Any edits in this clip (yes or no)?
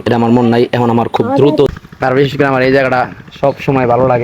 yes